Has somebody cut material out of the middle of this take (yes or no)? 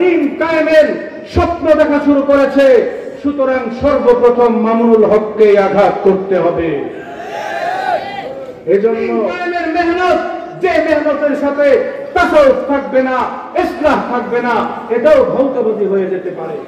yes